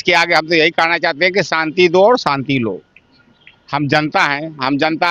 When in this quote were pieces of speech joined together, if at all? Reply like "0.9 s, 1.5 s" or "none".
none